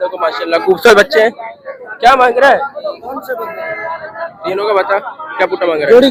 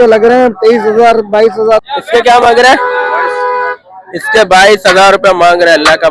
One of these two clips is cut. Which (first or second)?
second